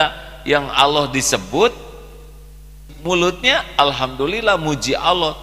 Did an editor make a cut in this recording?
yes; 1 cut; at 2.9 s

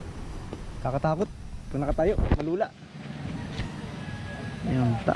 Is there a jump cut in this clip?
no; 0 cuts

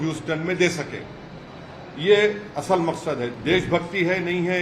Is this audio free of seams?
no; 1 cut; at 3.3 s

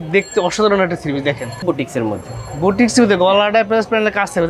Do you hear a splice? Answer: yes; 1 cut; at 1.6 s

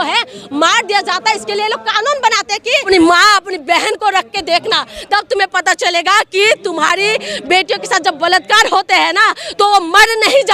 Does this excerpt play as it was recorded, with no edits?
no; 1 cut; at 2.8 s

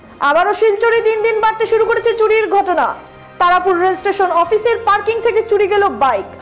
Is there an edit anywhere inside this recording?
no; 0 cuts

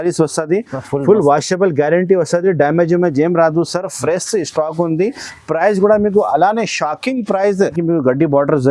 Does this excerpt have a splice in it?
yes; 1 cut; at 7.8 s

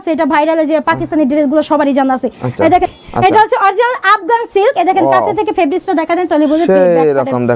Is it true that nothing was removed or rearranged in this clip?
no; 1 cut; at 2.9 s

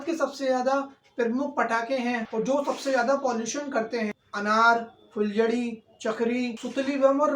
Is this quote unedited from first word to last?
yes; 0 cuts

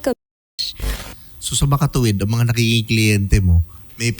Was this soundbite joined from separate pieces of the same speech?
yes; 1 cut; at 0.9 s

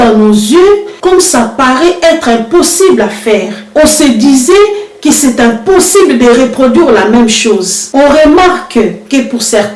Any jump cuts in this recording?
no; 0 cuts

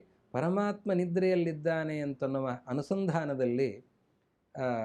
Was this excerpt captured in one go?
yes; 0 cuts

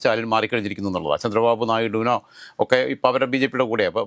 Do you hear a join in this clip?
no; 0 cuts

